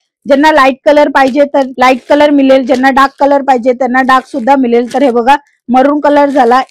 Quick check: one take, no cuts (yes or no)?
yes